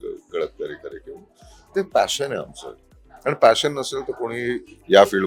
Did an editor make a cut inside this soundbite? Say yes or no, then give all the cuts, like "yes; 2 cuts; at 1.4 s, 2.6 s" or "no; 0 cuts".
no; 0 cuts